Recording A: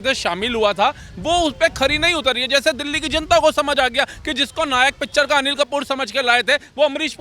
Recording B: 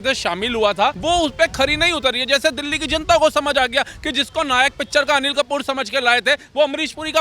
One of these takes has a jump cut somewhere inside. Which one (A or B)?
B